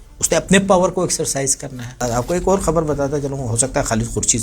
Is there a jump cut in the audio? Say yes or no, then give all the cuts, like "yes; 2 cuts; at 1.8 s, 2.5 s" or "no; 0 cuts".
yes; 1 cut; at 2.0 s